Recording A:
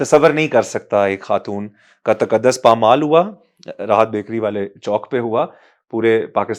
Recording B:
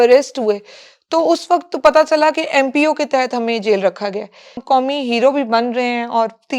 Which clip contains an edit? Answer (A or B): B